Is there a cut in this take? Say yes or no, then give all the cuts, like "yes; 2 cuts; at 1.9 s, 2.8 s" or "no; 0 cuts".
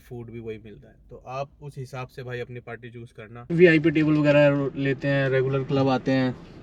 yes; 1 cut; at 3.4 s